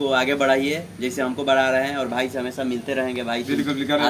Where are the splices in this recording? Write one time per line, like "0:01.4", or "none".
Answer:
none